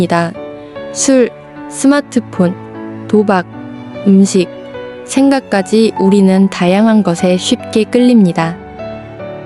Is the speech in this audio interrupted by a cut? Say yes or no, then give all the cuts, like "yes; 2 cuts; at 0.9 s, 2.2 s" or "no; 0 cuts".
no; 0 cuts